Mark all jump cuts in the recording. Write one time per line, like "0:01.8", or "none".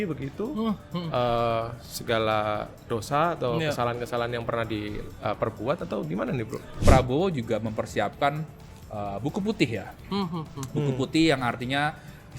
0:06.8